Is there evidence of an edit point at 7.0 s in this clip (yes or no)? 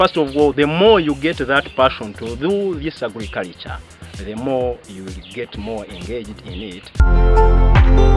yes